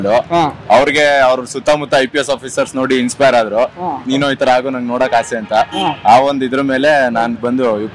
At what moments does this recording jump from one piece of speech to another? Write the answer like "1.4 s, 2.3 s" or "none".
4.0 s